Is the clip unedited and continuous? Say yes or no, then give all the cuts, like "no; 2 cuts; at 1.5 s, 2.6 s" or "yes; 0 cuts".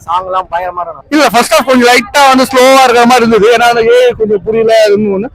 no; 1 cut; at 0.9 s